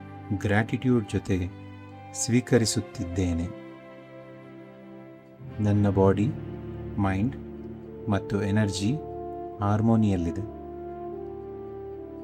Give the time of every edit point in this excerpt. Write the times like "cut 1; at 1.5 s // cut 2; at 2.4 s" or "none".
none